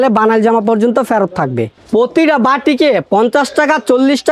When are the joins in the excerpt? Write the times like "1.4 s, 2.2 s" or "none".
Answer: 1.8 s